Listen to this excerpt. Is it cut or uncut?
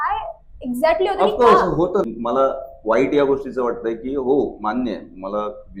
cut